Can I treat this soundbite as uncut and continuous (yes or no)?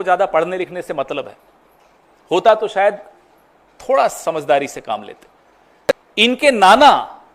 yes